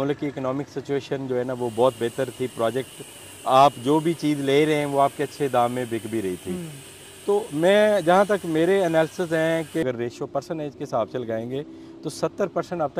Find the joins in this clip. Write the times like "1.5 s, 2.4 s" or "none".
9.8 s

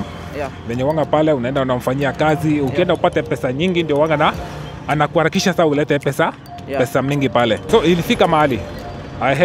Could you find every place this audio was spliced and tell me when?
7.6 s

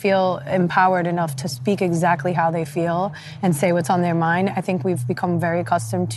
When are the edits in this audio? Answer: none

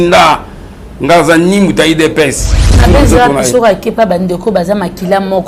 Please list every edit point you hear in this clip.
2.8 s

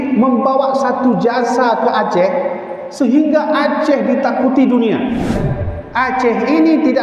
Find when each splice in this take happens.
5.4 s

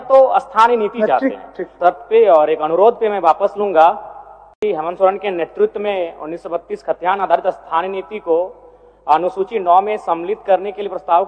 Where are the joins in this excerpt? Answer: 1.7 s, 4.6 s

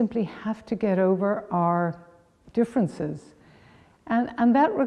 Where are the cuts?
none

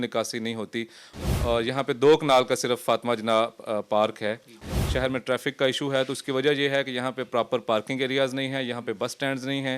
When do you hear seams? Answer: 1.0 s, 4.7 s

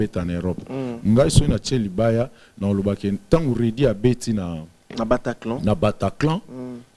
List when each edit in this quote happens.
none

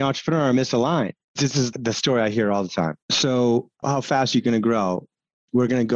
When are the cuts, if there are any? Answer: 1.8 s, 3.1 s, 3.7 s

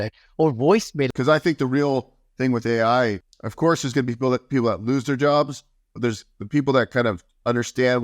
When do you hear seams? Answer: 1.1 s, 3.3 s

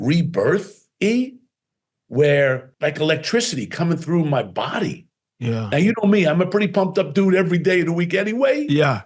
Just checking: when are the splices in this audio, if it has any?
2.7 s

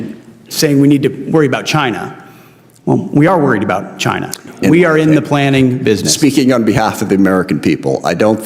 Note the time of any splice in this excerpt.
4.4 s

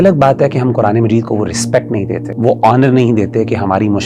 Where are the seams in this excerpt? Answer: 2.3 s

